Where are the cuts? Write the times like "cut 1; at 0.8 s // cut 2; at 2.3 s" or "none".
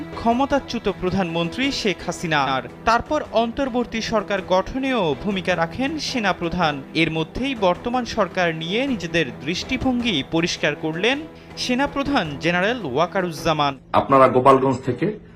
cut 1; at 2.5 s // cut 2; at 13.8 s